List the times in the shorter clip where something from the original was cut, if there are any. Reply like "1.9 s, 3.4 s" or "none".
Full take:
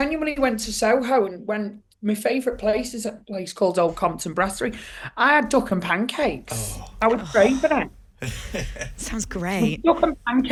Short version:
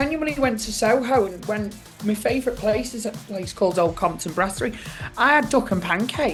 none